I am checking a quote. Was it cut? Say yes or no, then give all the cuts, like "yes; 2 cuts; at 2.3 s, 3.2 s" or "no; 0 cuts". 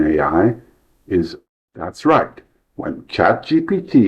yes; 1 cut; at 1.4 s